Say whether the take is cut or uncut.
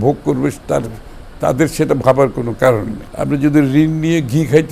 cut